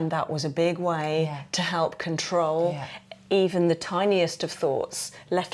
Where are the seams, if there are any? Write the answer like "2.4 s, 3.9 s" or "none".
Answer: none